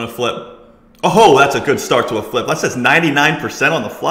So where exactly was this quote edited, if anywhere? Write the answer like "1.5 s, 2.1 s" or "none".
none